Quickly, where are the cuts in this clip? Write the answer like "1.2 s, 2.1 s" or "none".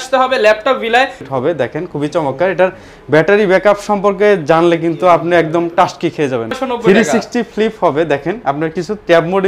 1.2 s, 6.5 s